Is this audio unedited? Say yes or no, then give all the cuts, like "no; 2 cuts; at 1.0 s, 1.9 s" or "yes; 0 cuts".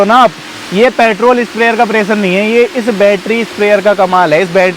yes; 0 cuts